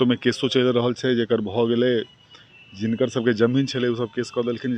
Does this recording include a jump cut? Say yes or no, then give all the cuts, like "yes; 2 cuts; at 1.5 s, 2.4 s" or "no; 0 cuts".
no; 0 cuts